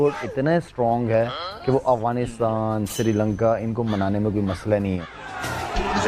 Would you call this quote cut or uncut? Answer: cut